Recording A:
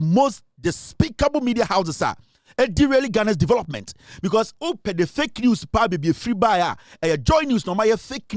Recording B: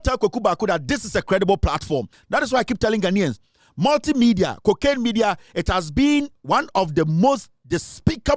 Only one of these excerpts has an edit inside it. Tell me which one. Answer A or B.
B